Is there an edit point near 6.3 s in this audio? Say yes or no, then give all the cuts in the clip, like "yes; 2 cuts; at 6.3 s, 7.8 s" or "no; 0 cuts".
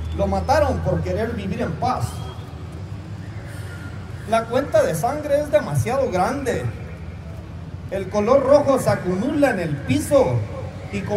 yes; 1 cut; at 6.3 s